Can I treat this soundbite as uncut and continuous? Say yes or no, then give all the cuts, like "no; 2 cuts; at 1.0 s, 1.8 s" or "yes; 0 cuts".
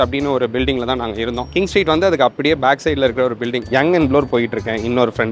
no; 1 cut; at 3.7 s